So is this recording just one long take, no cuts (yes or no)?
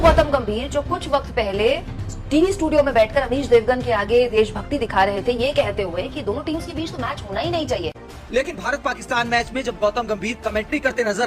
no